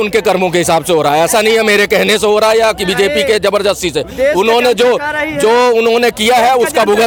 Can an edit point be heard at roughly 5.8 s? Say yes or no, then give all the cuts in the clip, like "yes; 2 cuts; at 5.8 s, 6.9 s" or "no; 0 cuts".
no; 0 cuts